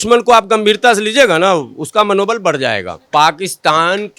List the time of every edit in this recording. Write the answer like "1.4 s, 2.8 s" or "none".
3.0 s